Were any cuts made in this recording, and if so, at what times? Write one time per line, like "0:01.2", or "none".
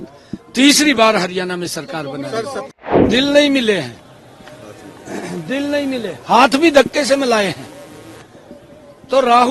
0:03.0